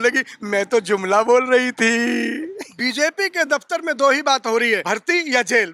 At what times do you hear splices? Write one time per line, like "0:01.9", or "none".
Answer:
0:02.6
0:04.8